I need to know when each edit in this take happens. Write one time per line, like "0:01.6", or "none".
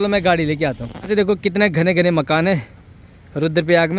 0:01.1